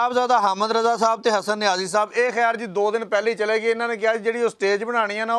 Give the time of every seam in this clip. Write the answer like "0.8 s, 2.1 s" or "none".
none